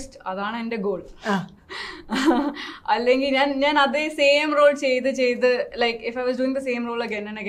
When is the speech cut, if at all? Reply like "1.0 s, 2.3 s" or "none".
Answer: none